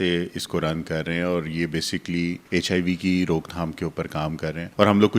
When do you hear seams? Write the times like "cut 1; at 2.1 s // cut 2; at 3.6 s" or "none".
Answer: cut 1; at 2.4 s